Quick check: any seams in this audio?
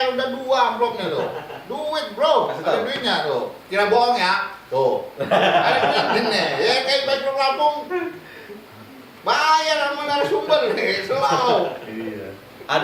no; 0 cuts

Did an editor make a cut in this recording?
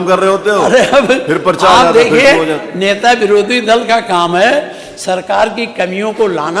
no; 0 cuts

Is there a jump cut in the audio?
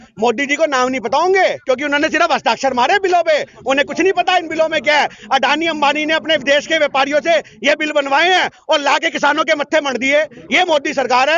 no; 0 cuts

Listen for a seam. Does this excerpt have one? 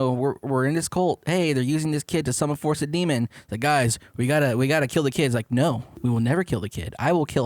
yes; 1 cut; at 5.9 s

